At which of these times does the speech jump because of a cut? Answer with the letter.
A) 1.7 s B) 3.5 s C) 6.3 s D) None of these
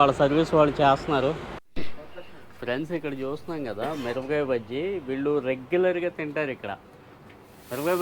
A